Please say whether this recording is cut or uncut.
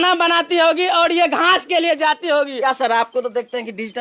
cut